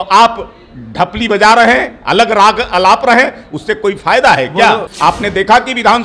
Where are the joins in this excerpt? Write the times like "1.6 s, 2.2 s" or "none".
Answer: 4.9 s